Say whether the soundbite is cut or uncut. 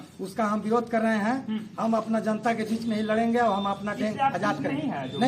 uncut